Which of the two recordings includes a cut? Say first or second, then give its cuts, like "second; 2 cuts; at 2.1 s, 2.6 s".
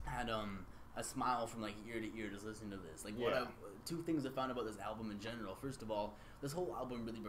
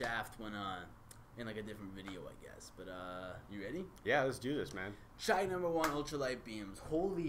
second; 1 cut; at 3.9 s